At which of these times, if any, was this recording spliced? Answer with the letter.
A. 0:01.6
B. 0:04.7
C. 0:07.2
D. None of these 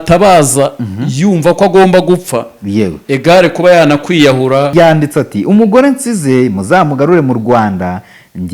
B